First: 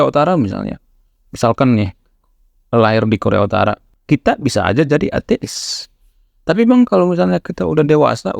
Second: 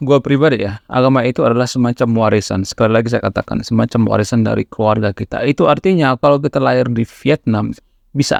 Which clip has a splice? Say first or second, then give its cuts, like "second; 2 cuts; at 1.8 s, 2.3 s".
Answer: first; 1 cut; at 3.9 s